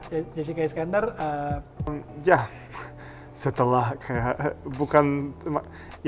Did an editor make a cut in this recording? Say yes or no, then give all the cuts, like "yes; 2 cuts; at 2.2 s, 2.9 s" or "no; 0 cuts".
yes; 1 cut; at 2.0 s